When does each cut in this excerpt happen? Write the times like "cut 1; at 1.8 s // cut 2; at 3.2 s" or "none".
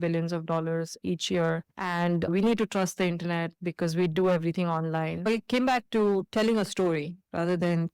cut 1; at 1.0 s // cut 2; at 2.3 s // cut 3; at 5.3 s